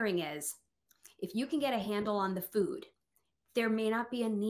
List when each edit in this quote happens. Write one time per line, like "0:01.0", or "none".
none

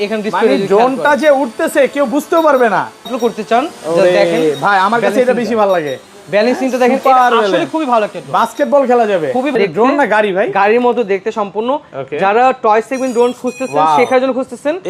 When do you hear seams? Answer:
0:03.1
0:09.5

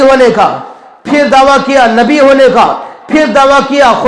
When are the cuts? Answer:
none

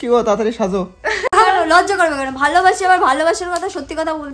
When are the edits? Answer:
0:01.3

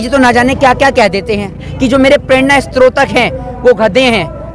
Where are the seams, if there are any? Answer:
0:01.7

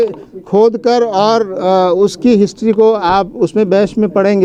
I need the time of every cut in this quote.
none

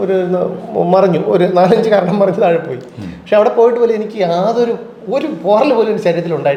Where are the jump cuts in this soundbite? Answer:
none

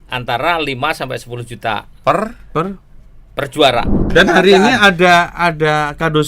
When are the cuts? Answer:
0:04.1

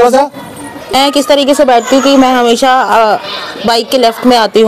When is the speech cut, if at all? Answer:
0:00.9

